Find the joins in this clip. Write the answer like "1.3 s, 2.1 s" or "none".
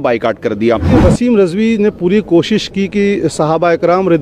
1.0 s